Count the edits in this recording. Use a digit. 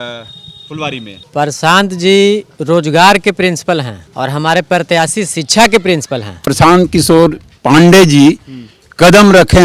3